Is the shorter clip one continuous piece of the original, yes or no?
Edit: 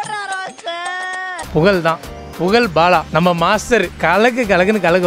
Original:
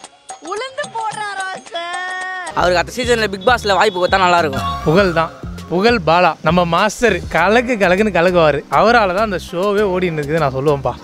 no